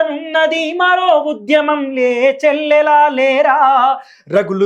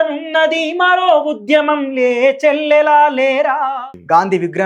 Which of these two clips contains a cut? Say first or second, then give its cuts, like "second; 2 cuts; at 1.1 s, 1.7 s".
second; 1 cut; at 3.7 s